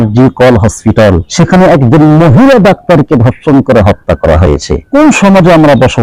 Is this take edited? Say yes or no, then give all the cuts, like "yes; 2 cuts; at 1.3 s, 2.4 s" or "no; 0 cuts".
yes; 2 cuts; at 1.3 s, 4.9 s